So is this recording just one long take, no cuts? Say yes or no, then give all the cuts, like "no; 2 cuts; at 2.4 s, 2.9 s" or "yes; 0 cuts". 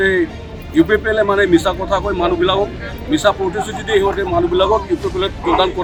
yes; 0 cuts